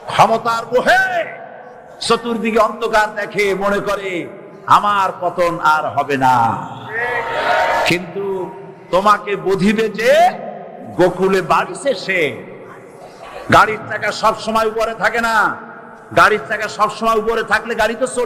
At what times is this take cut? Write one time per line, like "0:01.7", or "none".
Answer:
none